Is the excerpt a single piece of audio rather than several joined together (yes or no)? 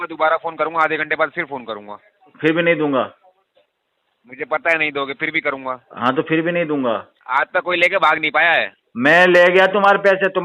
no